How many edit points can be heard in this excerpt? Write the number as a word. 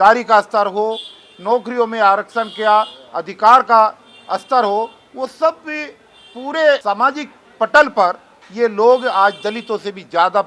one